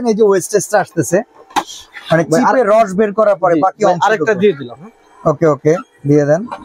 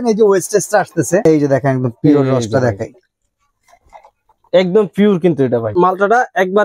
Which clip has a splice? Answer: second; 2 cuts; at 1.2 s, 5.7 s

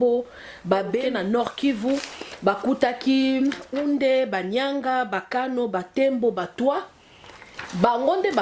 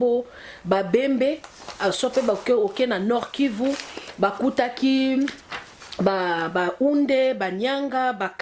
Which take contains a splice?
first; 2 cuts; at 1.0 s, 3.7 s

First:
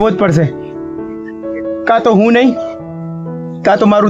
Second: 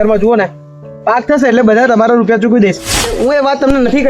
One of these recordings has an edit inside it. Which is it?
second; 1 cut; at 3.0 s

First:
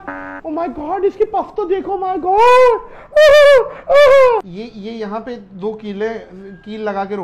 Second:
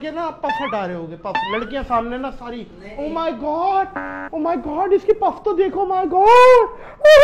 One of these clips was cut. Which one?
first; 1 cut; at 4.5 s

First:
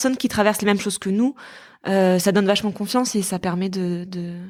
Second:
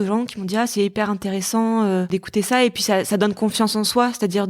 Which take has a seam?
second; 1 cut; at 2.1 s

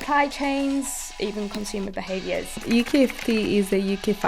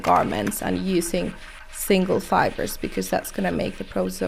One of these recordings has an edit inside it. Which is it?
first; 1 cut; at 2.6 s

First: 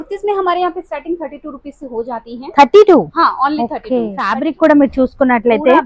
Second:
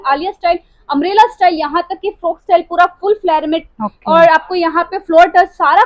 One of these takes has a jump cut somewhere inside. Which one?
first; 1 cut; at 4.4 s

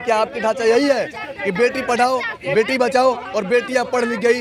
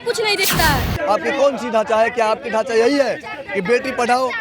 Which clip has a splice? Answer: second; 1 cut; at 0.9 s

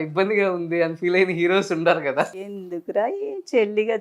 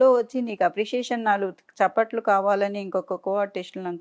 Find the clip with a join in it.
first; 1 cut; at 2.3 s

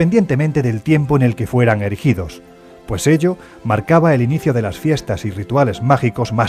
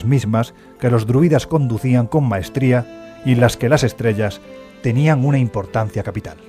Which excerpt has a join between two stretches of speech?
second; 1 cut; at 4.2 s

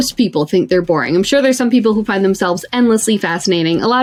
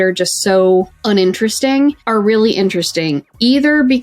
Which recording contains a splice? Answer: second; 2 cuts; at 0.9 s, 2.0 s

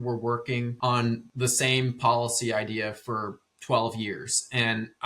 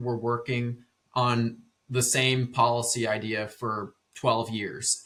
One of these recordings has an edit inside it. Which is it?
first; 1 cut; at 1.0 s

